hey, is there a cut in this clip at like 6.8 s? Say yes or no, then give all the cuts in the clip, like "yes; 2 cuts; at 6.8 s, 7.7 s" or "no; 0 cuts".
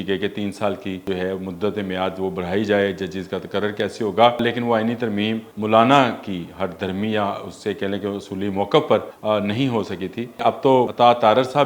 no; 5 cuts; at 1.0 s, 4.4 s, 5.5 s, 9.1 s, 10.7 s